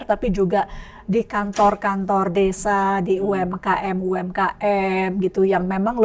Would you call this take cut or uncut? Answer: uncut